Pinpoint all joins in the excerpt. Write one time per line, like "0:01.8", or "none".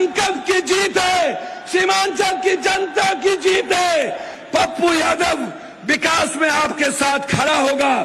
0:04.3

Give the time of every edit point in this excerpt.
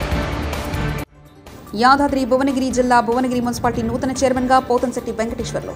0:01.2

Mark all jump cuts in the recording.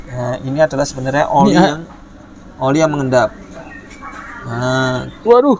none

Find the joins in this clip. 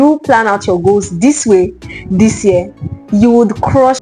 none

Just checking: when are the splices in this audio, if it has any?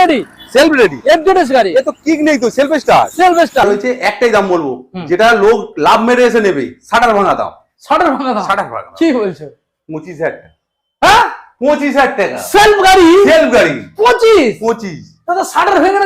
0:03.6

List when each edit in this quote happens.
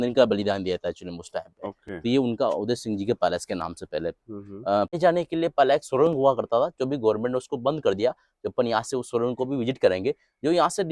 0:05.0

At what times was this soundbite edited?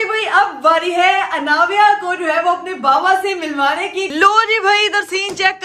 0:04.1

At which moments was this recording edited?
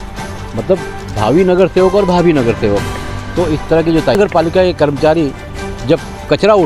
0:04.1

